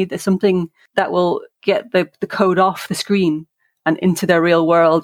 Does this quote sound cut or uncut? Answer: cut